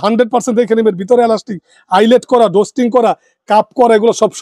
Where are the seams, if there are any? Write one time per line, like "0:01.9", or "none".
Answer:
none